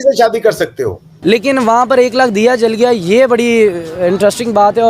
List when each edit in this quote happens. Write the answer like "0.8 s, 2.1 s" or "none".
1.1 s